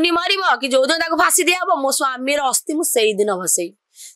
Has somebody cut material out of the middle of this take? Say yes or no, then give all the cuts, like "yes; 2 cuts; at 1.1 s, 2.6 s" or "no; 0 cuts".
no; 0 cuts